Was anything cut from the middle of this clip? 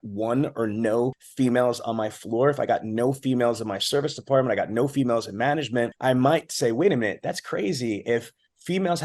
yes; 2 cuts; at 1.2 s, 5.9 s

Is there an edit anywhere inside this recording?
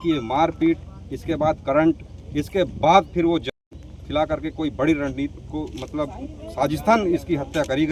no; 0 cuts

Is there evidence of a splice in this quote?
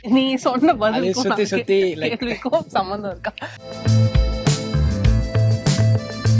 yes; 1 cut; at 3.6 s

